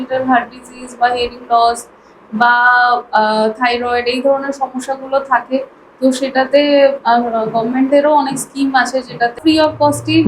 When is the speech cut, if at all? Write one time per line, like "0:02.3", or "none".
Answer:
0:09.4